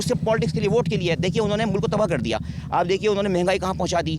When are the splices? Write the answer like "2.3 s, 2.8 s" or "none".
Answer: none